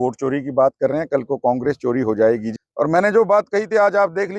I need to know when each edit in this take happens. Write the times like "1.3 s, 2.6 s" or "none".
2.6 s